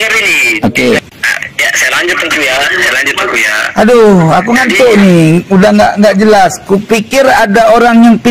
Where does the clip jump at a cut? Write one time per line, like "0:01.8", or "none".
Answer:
0:01.0

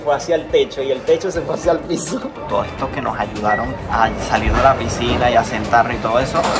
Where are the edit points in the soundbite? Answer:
0:02.4

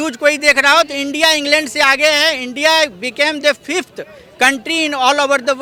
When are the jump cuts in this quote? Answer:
none

